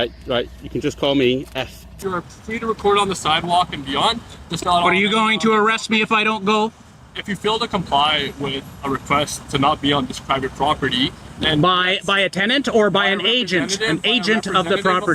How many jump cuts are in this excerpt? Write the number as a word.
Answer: one